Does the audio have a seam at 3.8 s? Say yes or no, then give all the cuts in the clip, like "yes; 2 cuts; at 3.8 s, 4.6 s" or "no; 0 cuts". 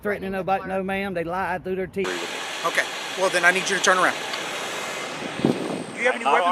no; 1 cut; at 2.1 s